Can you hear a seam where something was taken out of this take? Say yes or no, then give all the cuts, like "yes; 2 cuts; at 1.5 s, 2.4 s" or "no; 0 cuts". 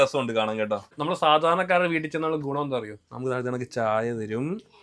yes; 1 cut; at 0.9 s